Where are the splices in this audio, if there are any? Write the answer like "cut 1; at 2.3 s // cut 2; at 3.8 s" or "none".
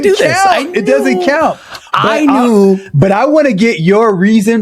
none

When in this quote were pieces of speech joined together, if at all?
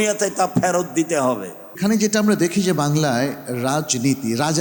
cut 1; at 1.8 s

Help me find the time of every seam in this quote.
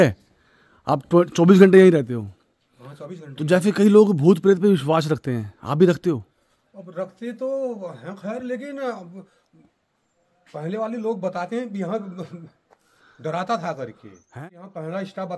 cut 1; at 14.4 s

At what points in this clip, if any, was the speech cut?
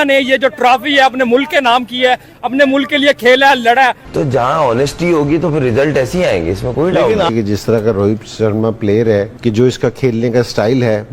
cut 1; at 4.0 s // cut 2; at 7.3 s

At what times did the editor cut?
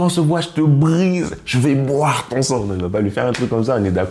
cut 1; at 2.6 s

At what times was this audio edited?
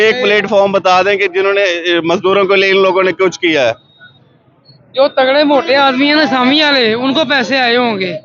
none

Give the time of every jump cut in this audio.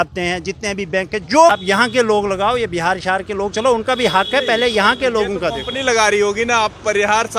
cut 1; at 1.5 s

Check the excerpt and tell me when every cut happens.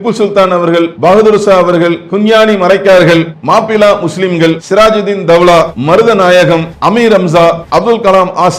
cut 1; at 0.9 s // cut 2; at 2.0 s // cut 3; at 3.3 s // cut 4; at 4.6 s // cut 5; at 5.8 s // cut 6; at 6.7 s // cut 7; at 7.6 s

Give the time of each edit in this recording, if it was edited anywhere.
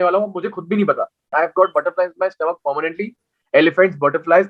cut 1; at 1.3 s

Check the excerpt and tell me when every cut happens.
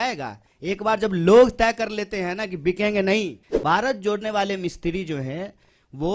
cut 1; at 3.4 s

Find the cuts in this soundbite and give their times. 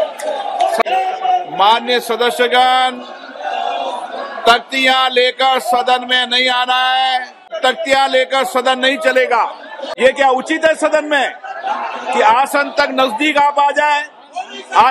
cut 1; at 0.8 s // cut 2; at 7.5 s // cut 3; at 9.8 s

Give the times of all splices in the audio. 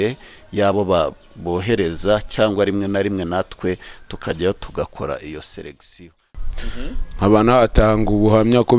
cut 1; at 6.3 s

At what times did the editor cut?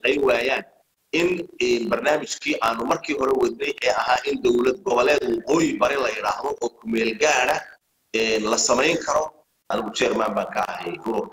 cut 1; at 9.6 s

